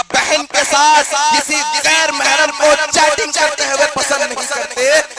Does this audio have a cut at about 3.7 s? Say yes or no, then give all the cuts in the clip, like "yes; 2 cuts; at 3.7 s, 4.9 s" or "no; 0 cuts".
no; 0 cuts